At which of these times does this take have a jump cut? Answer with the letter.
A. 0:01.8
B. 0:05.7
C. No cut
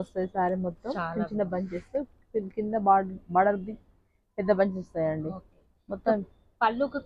C